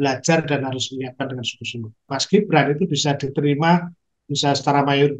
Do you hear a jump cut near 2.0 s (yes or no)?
yes